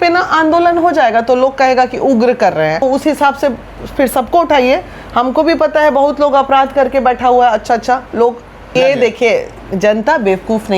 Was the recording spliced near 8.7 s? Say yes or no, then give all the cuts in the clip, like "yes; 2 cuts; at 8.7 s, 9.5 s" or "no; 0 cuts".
yes; 2 cuts; at 2.8 s, 8.7 s